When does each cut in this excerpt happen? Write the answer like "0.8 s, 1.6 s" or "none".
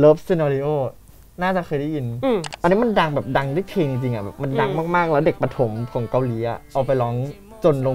2.5 s